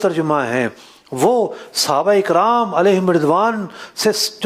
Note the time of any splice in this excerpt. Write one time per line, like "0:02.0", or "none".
none

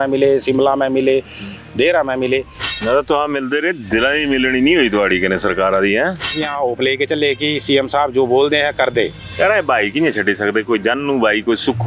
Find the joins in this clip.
0:02.7
0:06.3

